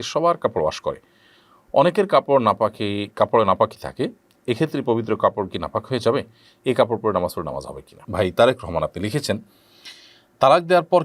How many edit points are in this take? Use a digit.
1